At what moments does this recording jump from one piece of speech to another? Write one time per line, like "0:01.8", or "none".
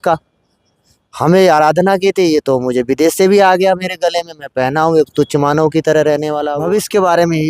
0:06.5